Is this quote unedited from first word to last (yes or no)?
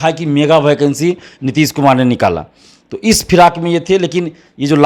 yes